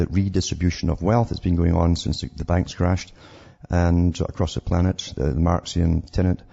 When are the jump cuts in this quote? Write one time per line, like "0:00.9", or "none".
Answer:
0:02.7